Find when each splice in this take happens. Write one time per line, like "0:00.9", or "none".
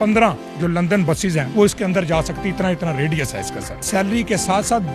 0:01.4
0:03.8